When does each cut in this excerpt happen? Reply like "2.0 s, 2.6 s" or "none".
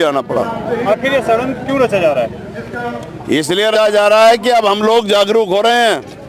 3.7 s